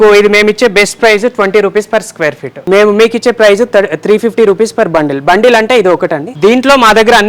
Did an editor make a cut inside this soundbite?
yes; 2 cuts; at 2.5 s, 6.2 s

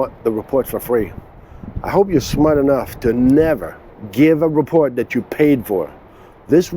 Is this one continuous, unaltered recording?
no; 1 cut; at 3.8 s

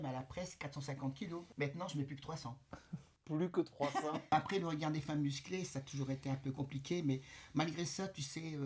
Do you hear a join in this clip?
yes; 2 cuts; at 1.5 s, 4.3 s

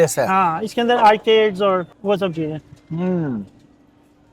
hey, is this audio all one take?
no; 1 cut; at 1.9 s

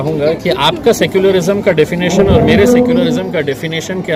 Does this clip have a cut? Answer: no; 0 cuts

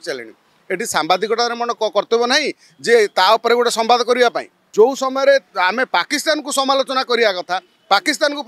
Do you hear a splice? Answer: yes; 1 cut; at 4.6 s

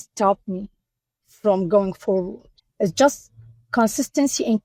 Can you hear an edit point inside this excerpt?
no; 0 cuts

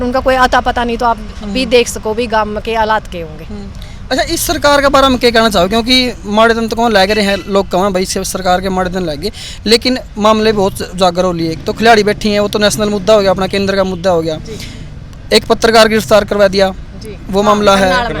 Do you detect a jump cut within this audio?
no; 0 cuts

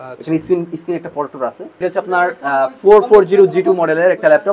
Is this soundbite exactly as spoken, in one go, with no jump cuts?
no; 1 cut; at 1.8 s

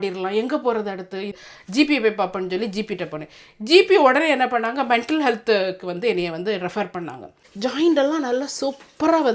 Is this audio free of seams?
no; 2 cuts; at 1.4 s, 7.4 s

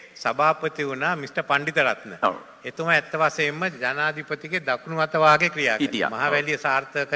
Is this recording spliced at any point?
no; 0 cuts

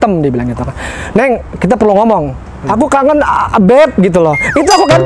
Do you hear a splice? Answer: yes; 1 cut; at 2.6 s

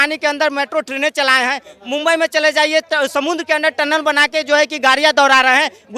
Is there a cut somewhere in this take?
no; 0 cuts

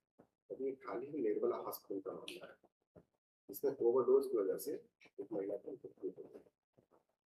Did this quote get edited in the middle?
no; 0 cuts

